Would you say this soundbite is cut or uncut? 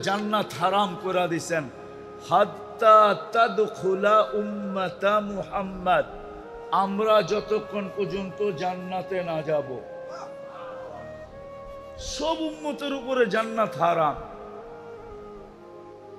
cut